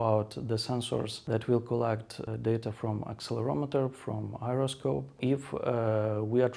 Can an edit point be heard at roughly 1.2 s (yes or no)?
yes